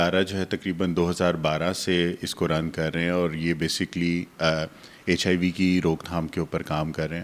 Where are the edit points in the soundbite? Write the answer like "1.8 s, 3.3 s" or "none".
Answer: none